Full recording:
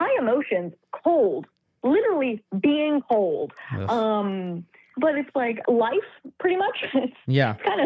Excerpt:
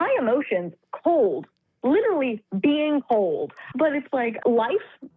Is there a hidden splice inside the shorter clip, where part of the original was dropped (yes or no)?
yes